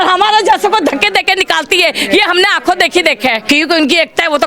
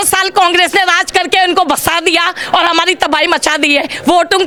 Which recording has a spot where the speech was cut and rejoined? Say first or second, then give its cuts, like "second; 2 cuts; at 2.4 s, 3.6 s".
first; 1 cut; at 3.4 s